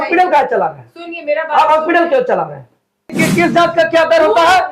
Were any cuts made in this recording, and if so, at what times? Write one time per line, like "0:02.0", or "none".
0:03.1